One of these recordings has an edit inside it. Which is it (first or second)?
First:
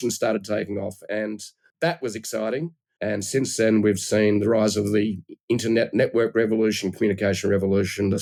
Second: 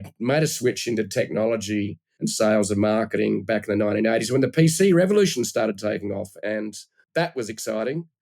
second